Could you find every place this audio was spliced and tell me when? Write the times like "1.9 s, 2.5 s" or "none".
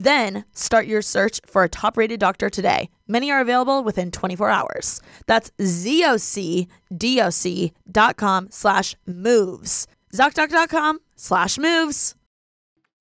none